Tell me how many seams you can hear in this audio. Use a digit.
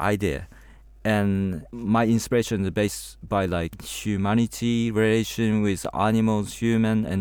2